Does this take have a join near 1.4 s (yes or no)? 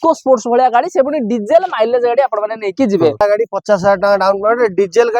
no